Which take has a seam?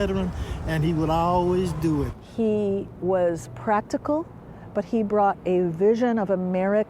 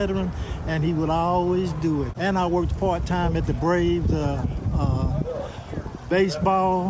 first; 1 cut; at 2.1 s

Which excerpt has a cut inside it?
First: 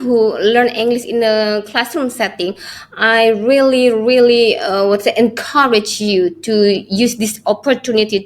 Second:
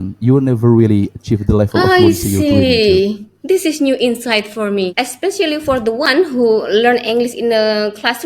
second; 1 cut; at 4.9 s

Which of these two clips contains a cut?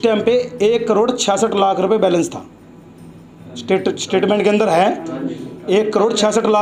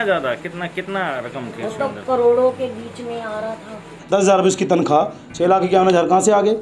second; 1 cut; at 3.9 s

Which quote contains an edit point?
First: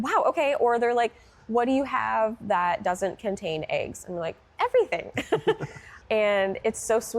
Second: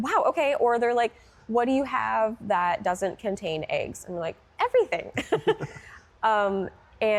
first; 1 cut; at 5.9 s

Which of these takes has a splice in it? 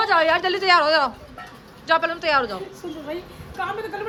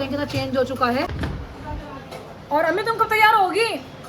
second; 1 cut; at 1.1 s

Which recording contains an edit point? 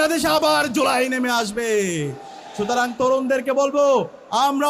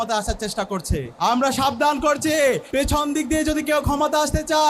second; 2 cuts; at 1.1 s, 2.6 s

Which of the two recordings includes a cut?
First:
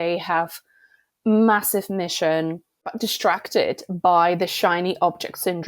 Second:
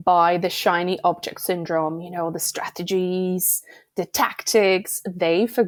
first; 1 cut; at 2.9 s

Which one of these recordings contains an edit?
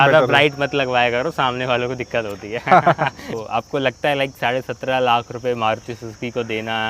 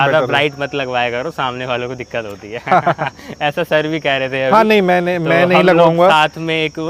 first; 1 cut; at 3.3 s

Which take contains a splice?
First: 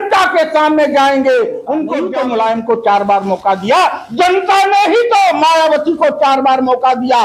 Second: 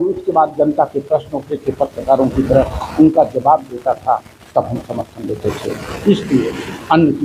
first; 1 cut; at 2.0 s

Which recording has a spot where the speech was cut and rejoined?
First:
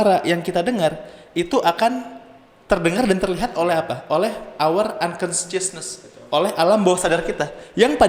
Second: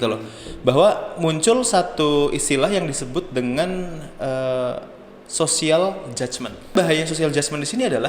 second; 1 cut; at 6.7 s

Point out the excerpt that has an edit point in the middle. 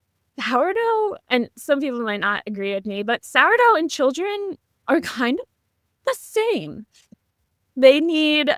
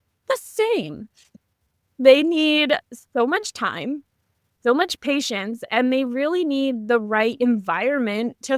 second; 1 cut; at 4.9 s

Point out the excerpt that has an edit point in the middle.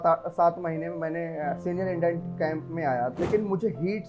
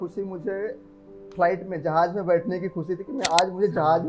first; 1 cut; at 3.1 s

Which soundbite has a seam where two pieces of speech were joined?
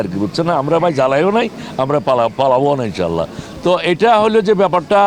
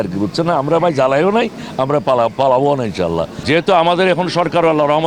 second; 1 cut; at 3.3 s

